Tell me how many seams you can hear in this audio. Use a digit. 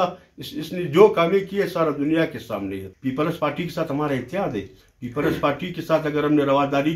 1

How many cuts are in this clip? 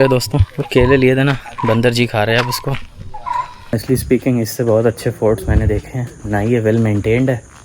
1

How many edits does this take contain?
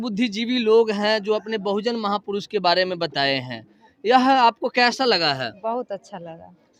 0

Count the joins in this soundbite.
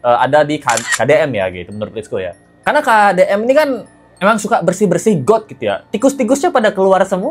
0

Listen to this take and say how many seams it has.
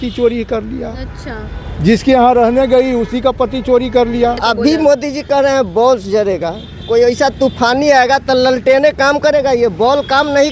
1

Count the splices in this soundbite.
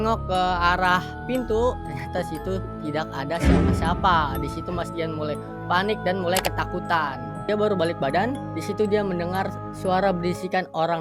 1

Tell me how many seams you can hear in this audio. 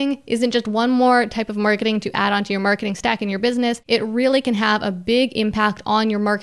1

